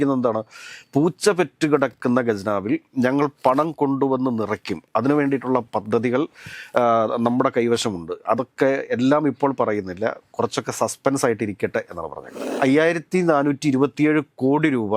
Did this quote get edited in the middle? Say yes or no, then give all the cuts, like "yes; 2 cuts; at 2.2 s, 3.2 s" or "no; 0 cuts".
yes; 1 cut; at 12.5 s